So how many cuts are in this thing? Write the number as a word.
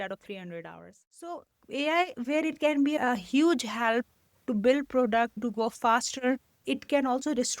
four